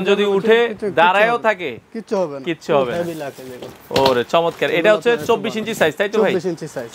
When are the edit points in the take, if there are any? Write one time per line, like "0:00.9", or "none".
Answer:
none